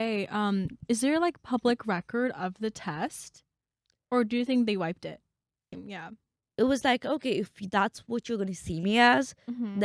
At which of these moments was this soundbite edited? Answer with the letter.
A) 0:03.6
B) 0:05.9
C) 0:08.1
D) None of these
B